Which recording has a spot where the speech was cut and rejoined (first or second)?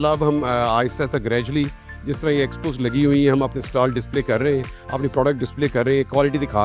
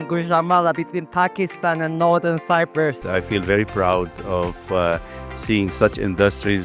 second